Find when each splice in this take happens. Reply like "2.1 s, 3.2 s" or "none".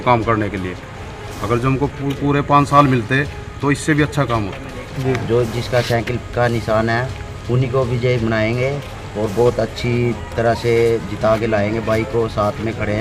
4.9 s